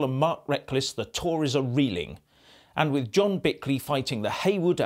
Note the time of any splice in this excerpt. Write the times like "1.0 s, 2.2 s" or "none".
1.9 s